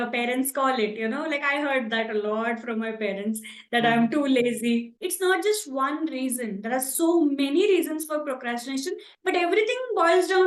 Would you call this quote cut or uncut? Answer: cut